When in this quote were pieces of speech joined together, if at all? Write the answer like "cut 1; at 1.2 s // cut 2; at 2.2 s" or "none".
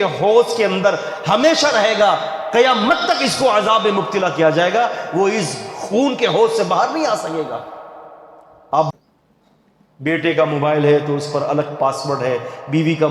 cut 1; at 8.9 s